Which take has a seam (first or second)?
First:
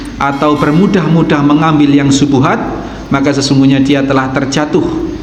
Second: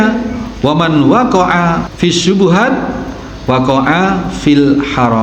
second